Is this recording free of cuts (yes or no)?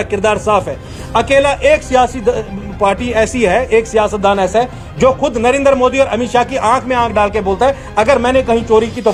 yes